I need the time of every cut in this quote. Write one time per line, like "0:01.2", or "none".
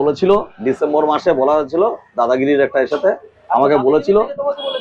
none